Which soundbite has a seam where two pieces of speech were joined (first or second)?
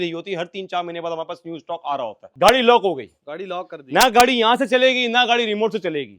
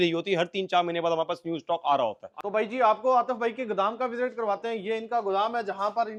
first